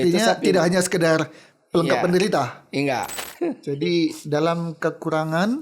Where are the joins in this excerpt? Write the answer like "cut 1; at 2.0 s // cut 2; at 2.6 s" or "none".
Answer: cut 1; at 3.2 s